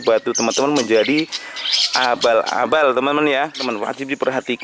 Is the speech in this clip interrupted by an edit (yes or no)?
yes